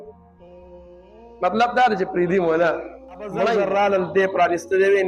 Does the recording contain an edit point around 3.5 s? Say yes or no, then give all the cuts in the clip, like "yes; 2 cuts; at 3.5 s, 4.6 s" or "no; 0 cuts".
yes; 1 cut; at 3.5 s